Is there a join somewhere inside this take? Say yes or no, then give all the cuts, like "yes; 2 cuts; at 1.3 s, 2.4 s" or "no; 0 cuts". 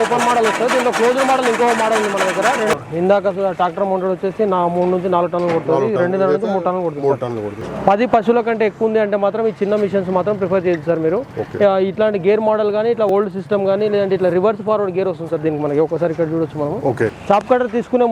yes; 4 cuts; at 2.8 s, 7.6 s, 13.1 s, 17.2 s